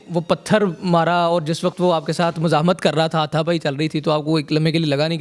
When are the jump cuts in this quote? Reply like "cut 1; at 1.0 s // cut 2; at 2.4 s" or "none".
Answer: none